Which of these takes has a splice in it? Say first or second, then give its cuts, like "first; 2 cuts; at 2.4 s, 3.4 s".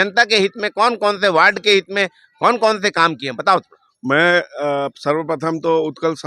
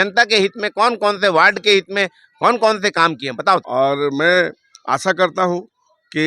second; 1 cut; at 3.7 s